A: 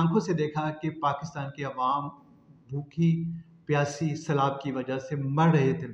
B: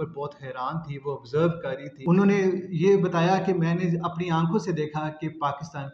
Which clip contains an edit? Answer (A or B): B